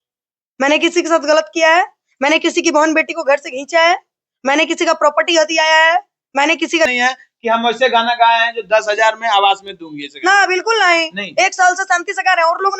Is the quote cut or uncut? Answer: cut